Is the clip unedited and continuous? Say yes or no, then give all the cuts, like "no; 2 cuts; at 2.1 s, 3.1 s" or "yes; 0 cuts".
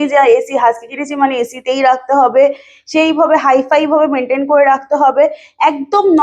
yes; 0 cuts